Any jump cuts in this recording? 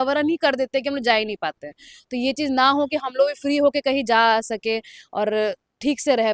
no; 0 cuts

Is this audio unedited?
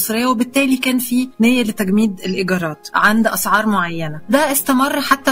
no; 3 cuts; at 1.3 s, 2.8 s, 4.3 s

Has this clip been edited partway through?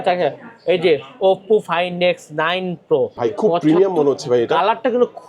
yes; 1 cut; at 3.1 s

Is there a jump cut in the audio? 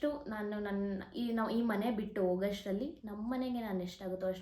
no; 0 cuts

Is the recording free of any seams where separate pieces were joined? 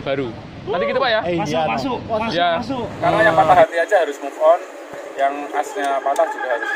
no; 1 cut; at 3.0 s

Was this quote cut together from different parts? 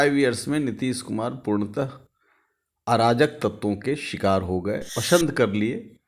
yes; 1 cut; at 4.9 s

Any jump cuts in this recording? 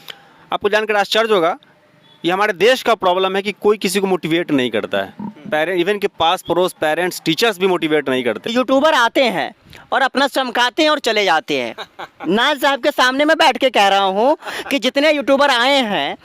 yes; 1 cut; at 8.4 s

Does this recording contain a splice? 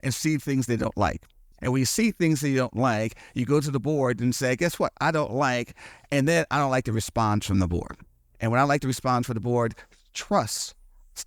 no; 0 cuts

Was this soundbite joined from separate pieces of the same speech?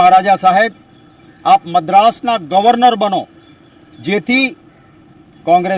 yes; 1 cut; at 2.2 s

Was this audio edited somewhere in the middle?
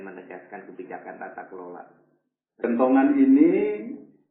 yes; 1 cut; at 2.6 s

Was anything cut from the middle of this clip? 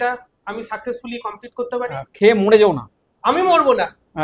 no; 0 cuts

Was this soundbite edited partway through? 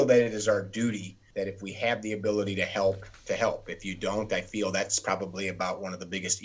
yes; 2 cuts; at 1.1 s, 3.1 s

